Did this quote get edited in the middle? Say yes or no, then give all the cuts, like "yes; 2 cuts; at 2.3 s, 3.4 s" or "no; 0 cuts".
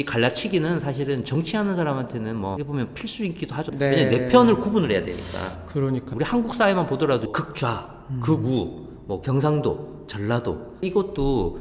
no; 0 cuts